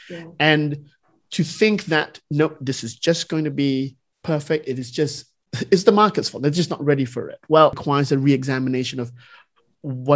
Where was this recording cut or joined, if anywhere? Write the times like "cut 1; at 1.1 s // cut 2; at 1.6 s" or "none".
cut 1; at 7.8 s